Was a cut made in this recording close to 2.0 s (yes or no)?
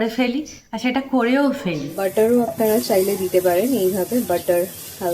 yes